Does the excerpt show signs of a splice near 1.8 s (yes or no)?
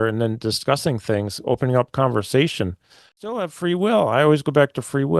no